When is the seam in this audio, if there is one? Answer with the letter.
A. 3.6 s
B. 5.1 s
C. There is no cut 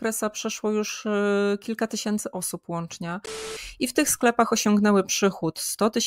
A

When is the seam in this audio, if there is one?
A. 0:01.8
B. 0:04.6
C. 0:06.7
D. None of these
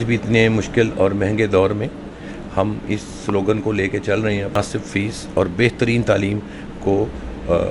B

